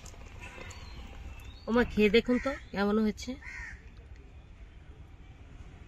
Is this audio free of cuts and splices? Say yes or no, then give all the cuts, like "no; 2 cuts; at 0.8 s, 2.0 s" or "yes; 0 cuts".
no; 1 cut; at 1.5 s